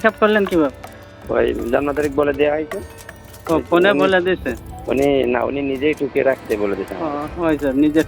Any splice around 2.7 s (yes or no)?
no